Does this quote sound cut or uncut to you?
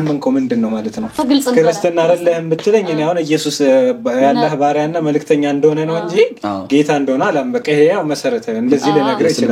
cut